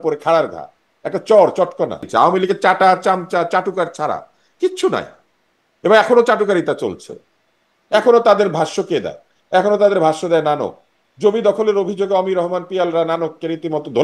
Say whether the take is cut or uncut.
cut